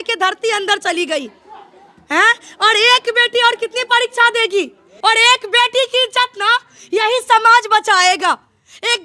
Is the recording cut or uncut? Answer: cut